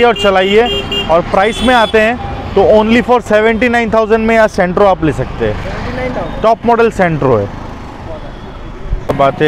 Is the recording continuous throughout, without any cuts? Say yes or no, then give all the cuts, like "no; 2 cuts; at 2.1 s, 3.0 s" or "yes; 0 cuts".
yes; 0 cuts